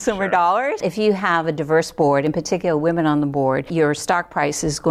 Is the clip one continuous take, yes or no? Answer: no